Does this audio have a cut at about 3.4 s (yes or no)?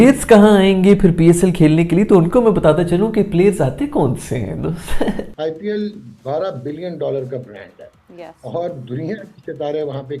no